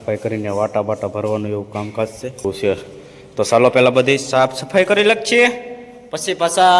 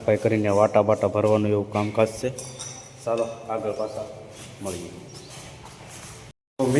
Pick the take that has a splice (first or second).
first